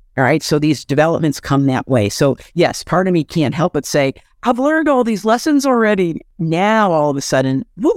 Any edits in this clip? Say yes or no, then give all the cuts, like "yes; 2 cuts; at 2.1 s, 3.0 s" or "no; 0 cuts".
yes; 1 cut; at 6.3 s